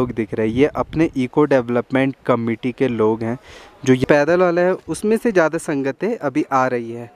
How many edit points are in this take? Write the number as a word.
one